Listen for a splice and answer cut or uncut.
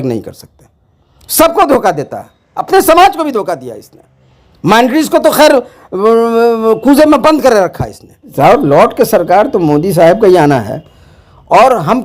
cut